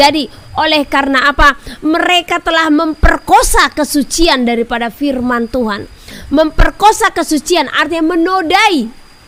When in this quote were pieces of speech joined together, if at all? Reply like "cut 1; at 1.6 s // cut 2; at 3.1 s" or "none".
none